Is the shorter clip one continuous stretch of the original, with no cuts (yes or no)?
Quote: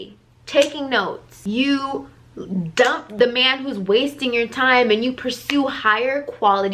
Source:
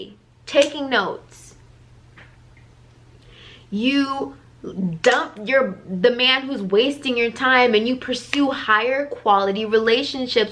no